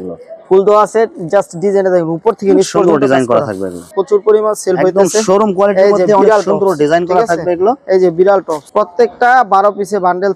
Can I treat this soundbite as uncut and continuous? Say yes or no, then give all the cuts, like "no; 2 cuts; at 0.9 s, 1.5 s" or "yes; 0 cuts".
yes; 0 cuts